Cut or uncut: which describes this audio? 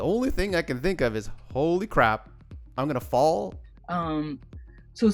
cut